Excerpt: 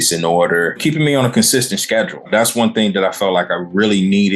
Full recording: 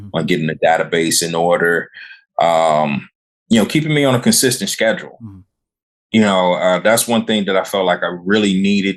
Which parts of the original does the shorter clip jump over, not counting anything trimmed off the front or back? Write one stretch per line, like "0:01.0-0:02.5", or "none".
0:01.9-0:03.7
0:05.2-0:06.8